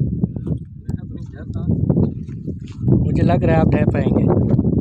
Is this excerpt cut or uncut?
uncut